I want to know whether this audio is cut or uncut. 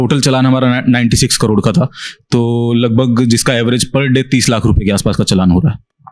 uncut